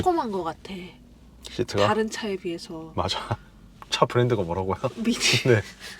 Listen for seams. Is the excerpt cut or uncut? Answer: uncut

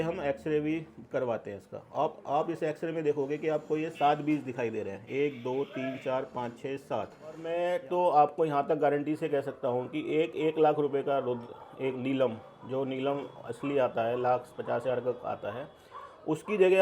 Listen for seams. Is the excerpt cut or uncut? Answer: cut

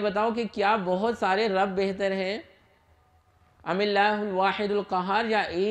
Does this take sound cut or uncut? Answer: uncut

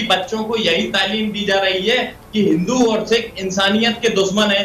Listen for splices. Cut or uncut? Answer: uncut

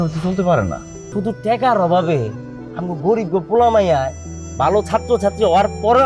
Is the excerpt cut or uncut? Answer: cut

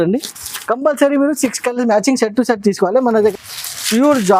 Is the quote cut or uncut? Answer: cut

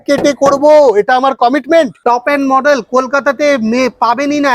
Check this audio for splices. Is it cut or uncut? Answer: cut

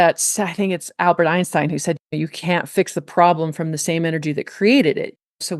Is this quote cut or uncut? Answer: uncut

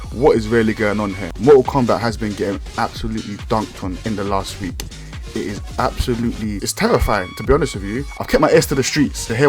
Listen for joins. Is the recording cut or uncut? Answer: cut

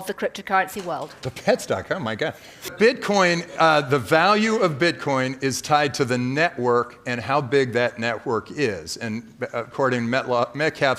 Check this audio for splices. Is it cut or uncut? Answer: cut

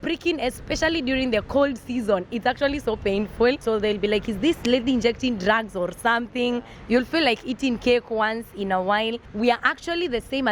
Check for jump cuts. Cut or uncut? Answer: cut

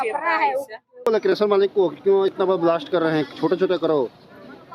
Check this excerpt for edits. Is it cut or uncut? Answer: cut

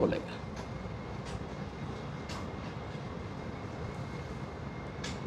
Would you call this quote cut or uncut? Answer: uncut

